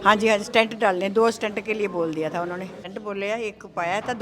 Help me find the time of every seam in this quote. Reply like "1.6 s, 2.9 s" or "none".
2.9 s